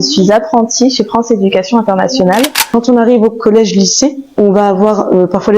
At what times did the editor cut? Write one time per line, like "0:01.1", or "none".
0:02.7